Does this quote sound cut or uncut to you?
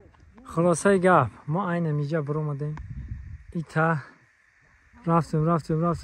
uncut